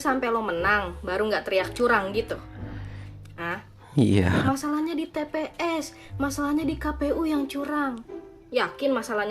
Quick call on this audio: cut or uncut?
uncut